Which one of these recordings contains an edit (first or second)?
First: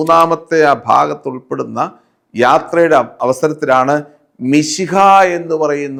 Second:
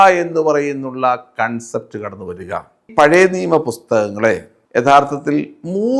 second